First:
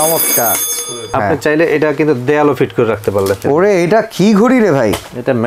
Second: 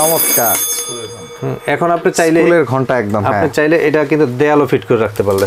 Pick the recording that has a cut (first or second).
first